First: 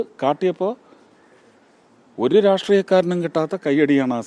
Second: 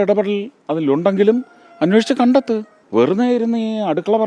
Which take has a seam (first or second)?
second